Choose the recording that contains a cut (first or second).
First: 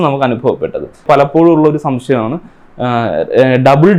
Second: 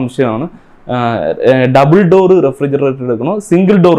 first